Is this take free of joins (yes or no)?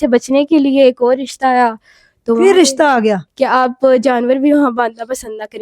no